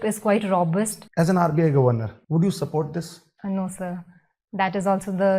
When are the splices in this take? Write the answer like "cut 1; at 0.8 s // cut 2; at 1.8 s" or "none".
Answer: cut 1; at 1.0 s // cut 2; at 2.1 s // cut 3; at 3.2 s